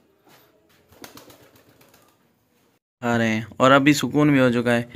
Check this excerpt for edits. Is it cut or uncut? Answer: cut